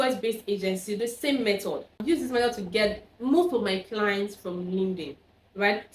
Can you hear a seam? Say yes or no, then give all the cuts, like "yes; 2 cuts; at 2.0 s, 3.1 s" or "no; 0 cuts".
yes; 1 cut; at 2.0 s